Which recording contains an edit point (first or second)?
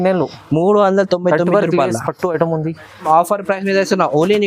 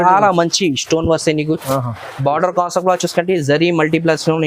first